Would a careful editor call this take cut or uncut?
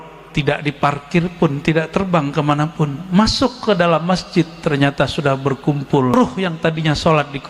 cut